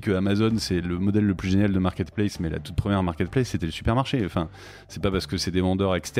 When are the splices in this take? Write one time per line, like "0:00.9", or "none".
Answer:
none